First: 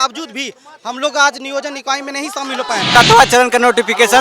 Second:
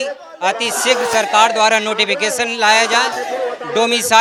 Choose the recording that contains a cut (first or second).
first